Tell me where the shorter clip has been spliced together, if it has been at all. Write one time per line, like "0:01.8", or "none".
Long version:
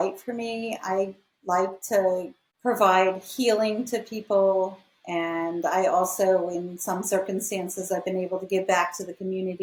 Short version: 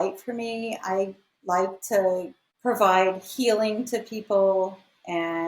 none